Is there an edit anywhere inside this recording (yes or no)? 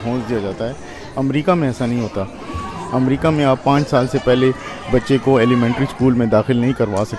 no